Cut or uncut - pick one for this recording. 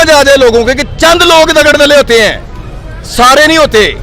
uncut